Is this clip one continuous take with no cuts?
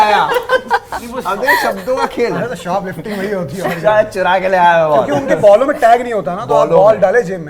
yes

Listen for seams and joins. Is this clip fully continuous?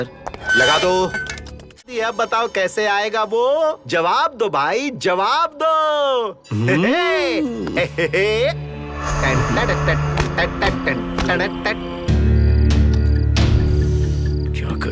no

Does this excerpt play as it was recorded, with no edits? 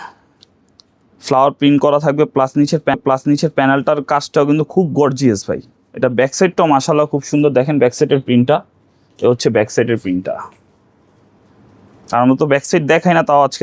yes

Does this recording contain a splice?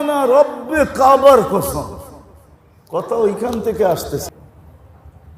yes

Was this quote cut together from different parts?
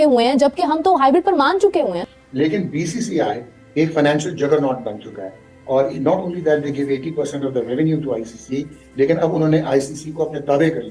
yes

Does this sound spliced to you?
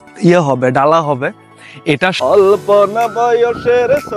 yes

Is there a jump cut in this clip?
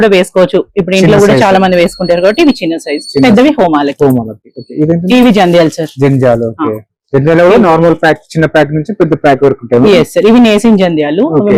no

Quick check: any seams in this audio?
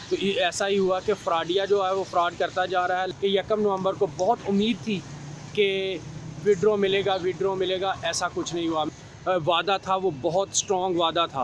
yes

